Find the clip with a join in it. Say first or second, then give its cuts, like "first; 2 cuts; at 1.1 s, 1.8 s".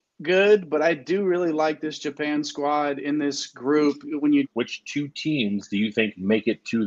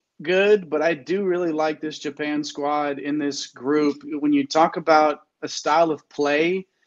first; 1 cut; at 4.5 s